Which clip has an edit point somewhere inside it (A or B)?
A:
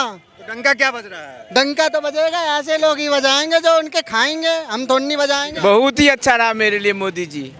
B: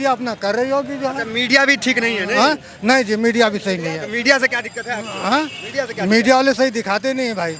A